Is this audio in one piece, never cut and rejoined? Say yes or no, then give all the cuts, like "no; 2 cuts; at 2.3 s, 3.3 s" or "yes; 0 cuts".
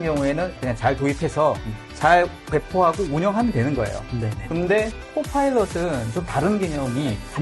yes; 0 cuts